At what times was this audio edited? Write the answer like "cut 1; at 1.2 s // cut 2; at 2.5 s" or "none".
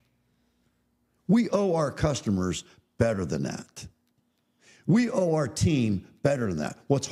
none